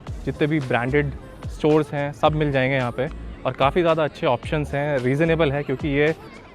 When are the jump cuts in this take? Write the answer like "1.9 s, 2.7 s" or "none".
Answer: none